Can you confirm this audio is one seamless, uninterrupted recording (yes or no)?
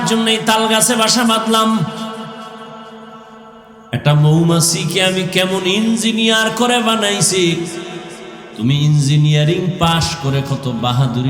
no